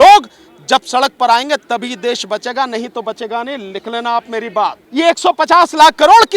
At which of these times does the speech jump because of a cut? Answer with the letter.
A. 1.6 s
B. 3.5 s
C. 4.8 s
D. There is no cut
C